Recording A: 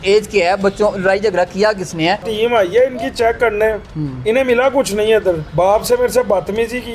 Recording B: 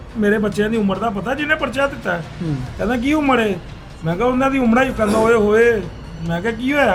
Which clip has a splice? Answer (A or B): A